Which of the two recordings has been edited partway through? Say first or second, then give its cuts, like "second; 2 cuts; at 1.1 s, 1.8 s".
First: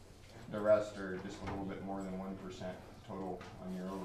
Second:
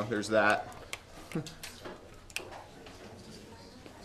first; 1 cut; at 1.8 s